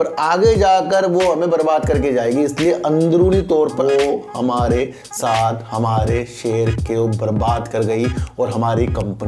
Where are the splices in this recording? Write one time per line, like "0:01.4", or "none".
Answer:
0:03.8